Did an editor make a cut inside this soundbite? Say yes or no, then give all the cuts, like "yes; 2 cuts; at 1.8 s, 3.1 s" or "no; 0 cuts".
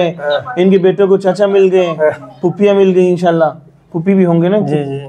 no; 0 cuts